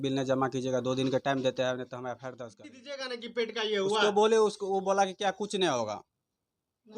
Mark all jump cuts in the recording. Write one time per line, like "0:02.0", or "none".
0:02.9